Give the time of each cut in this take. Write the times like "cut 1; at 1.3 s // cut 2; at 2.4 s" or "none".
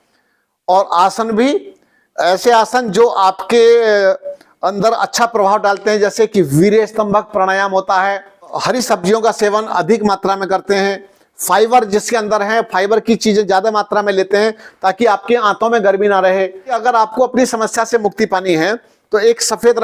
cut 1; at 8.6 s // cut 2; at 16.8 s